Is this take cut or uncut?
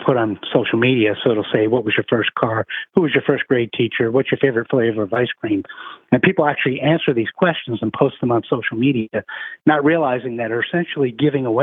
uncut